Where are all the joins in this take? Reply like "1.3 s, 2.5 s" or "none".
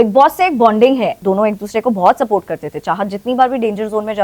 1.1 s